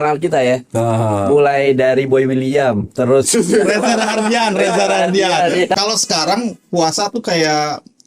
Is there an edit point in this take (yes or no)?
yes